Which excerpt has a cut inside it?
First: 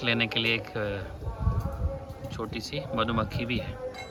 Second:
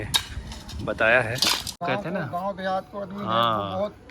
second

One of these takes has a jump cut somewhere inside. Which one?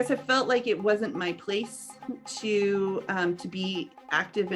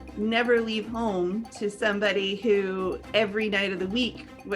second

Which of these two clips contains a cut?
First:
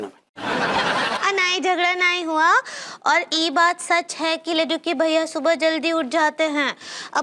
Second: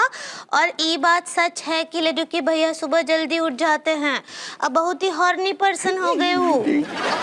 first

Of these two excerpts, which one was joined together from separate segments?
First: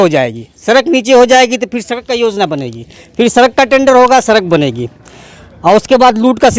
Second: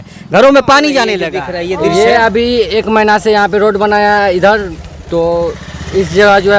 second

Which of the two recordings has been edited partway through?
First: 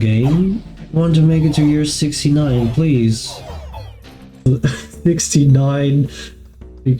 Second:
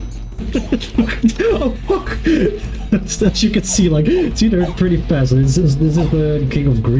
first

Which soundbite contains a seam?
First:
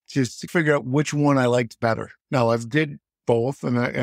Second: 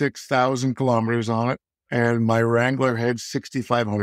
first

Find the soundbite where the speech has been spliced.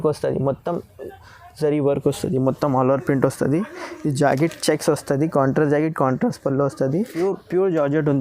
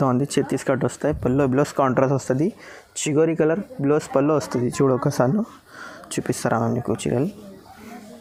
first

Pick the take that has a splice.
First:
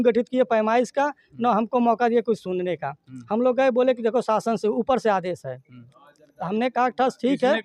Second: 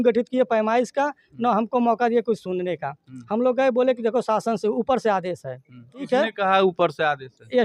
second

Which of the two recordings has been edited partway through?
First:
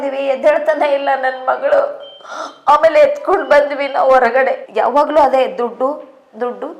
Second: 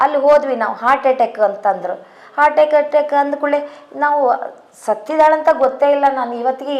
first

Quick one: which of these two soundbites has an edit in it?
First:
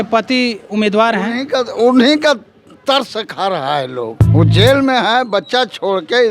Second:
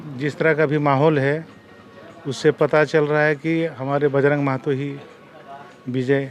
first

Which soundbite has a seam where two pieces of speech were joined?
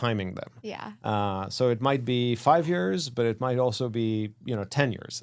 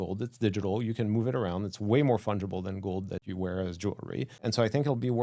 second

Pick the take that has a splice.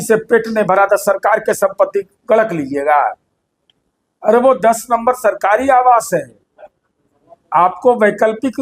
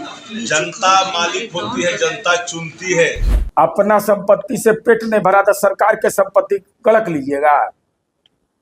second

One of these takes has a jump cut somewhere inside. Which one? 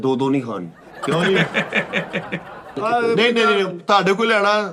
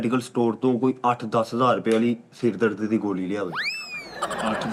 first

